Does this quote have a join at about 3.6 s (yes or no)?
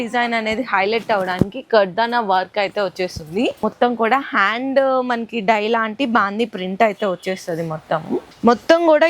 yes